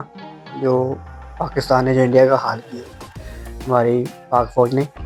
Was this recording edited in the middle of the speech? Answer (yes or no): no